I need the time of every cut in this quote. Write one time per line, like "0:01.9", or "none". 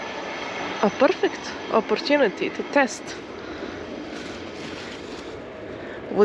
none